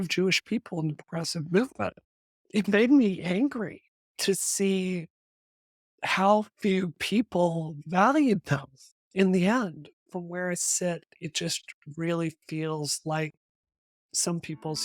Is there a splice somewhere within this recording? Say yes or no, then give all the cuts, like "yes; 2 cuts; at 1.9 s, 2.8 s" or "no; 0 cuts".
yes; 2 cuts; at 2.0 s, 10.0 s